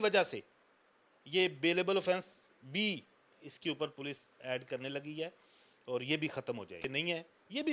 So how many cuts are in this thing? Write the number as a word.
zero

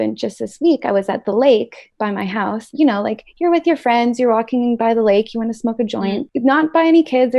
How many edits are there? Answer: one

